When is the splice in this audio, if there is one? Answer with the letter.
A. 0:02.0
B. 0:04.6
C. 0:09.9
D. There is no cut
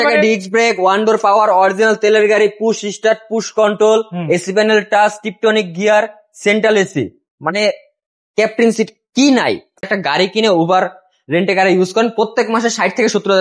C